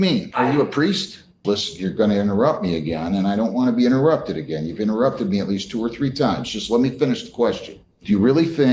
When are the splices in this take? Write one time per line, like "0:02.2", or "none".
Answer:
0:01.4